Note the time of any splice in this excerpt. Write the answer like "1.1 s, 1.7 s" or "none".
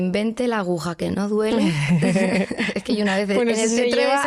none